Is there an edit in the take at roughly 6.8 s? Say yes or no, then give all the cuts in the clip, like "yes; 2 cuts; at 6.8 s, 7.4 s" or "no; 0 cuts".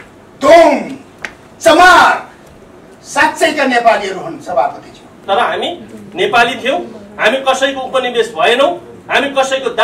no; 1 cut; at 5.1 s